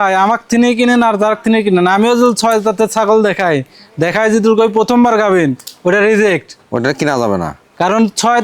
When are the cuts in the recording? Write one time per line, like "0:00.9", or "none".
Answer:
none